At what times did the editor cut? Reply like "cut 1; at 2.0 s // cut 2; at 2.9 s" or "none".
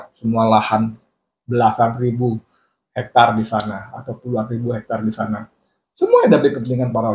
none